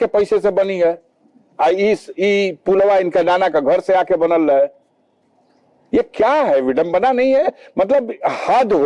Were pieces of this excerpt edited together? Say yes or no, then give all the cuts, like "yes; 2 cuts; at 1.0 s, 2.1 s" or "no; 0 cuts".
no; 0 cuts